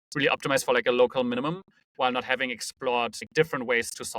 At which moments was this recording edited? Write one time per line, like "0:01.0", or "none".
0:03.2